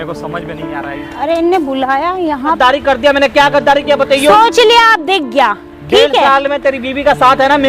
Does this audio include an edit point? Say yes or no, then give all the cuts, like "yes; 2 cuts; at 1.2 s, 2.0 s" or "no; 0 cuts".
yes; 1 cut; at 2.6 s